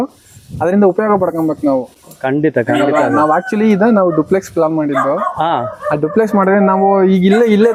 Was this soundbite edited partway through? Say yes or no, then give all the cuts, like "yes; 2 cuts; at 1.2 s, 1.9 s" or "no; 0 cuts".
no; 0 cuts